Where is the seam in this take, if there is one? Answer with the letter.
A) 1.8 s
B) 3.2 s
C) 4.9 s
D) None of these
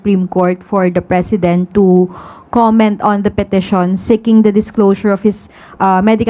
D